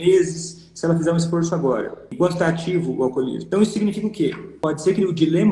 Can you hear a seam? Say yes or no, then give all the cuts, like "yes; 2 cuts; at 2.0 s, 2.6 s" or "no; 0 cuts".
yes; 3 cuts; at 2.0 s, 3.4 s, 4.5 s